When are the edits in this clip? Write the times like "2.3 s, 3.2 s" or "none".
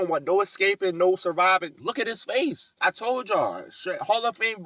1.8 s, 2.7 s